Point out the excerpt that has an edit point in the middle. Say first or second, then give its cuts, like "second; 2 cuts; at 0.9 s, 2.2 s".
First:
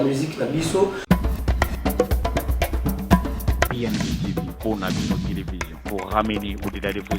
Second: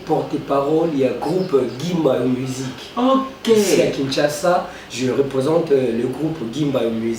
first; 1 cut; at 1.0 s